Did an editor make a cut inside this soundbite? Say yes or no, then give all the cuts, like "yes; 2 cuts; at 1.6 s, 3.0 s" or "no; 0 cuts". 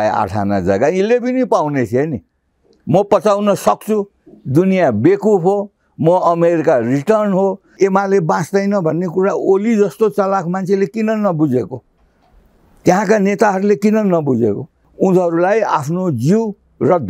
yes; 2 cuts; at 7.7 s, 14.8 s